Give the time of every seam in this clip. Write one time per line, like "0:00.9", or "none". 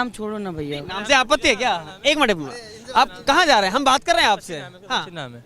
none